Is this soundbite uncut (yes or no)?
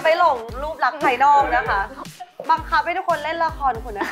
no